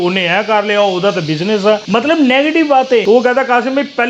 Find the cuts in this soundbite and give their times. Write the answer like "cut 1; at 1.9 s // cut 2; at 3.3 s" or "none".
cut 1; at 1.8 s // cut 2; at 3.0 s